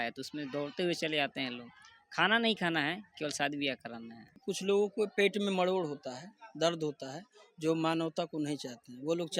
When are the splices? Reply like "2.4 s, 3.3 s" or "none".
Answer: 4.5 s